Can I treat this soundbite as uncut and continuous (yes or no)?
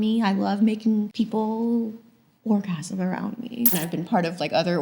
no